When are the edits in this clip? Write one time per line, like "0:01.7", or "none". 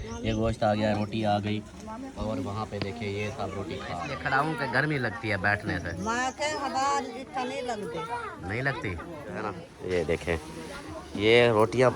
0:04.1
0:09.7